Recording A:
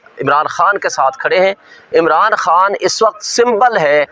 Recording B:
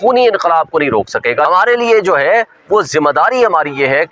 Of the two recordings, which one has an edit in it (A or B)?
B